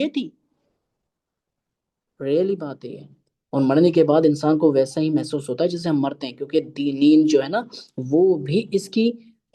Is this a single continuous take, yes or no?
yes